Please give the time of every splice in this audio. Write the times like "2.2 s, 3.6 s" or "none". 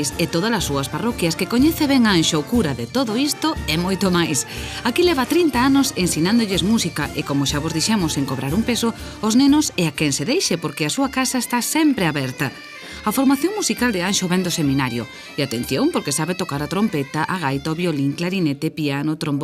17.8 s

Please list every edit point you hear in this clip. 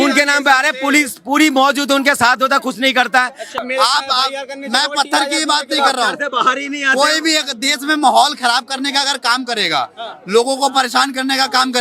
3.6 s

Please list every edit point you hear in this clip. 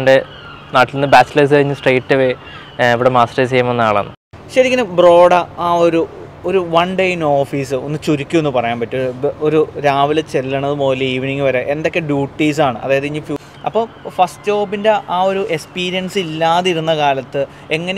4.2 s, 13.4 s

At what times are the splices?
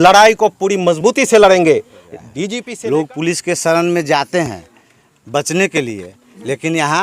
2.3 s

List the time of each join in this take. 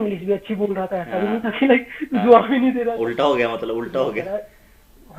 none

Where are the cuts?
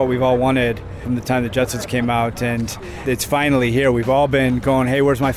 0.9 s, 3.0 s

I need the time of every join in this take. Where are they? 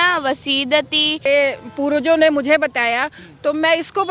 1.3 s

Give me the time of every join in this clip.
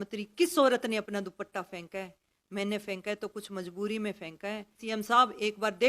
4.8 s

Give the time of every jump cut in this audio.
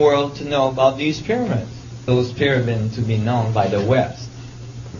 none

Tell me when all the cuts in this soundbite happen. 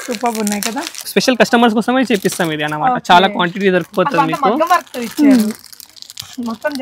1.1 s

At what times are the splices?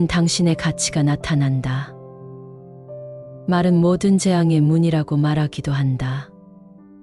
1.8 s, 3.4 s

